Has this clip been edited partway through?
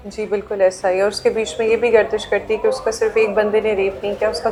no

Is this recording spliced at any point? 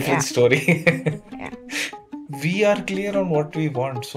yes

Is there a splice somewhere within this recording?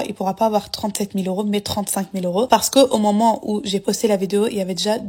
yes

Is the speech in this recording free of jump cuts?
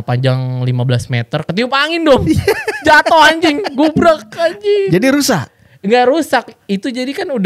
yes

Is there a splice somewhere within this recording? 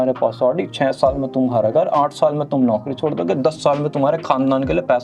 no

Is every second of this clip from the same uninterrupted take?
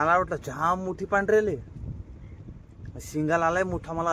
yes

